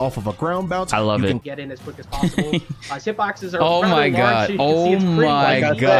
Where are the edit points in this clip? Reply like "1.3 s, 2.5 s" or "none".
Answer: 1.4 s